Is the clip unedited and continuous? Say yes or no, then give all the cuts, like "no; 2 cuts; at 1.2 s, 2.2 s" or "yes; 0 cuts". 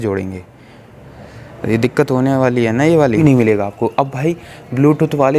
no; 1 cut; at 3.1 s